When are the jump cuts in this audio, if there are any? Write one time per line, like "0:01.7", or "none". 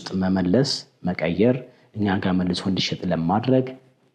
none